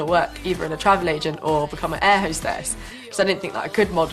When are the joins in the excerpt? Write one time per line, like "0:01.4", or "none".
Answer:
0:02.1